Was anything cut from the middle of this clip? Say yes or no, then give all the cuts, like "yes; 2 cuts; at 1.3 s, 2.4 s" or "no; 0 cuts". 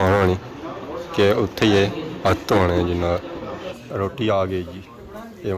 yes; 1 cut; at 3.6 s